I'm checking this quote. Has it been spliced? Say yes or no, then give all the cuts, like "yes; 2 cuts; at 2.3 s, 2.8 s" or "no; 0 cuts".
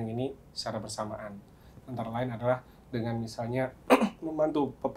no; 0 cuts